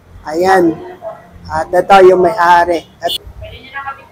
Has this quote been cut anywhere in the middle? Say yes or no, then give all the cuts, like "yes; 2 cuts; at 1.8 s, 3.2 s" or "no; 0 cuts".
yes; 1 cut; at 3.0 s